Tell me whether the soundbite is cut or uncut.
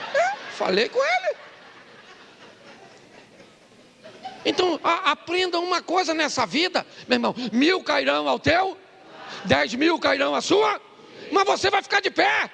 uncut